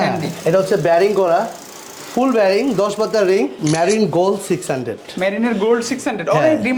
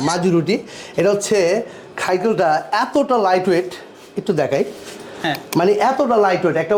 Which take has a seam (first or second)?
first